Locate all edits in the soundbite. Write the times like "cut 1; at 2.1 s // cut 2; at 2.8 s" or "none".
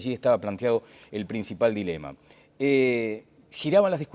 cut 1; at 2.8 s